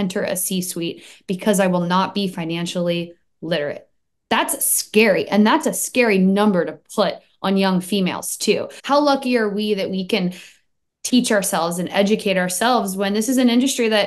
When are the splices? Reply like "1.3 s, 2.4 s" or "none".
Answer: 8.7 s